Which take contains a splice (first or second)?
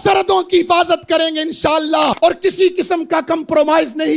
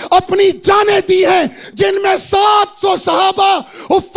first